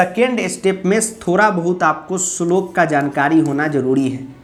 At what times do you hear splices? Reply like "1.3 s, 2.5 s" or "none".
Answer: none